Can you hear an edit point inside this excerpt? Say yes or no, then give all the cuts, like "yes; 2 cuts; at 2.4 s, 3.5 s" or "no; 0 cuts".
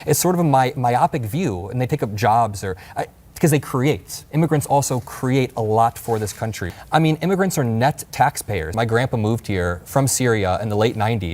yes; 1 cut; at 8.7 s